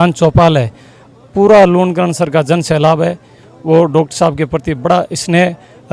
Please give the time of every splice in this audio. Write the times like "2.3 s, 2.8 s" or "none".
none